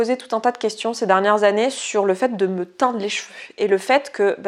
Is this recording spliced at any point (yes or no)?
no